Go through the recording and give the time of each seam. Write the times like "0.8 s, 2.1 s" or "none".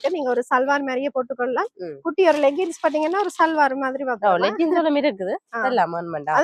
none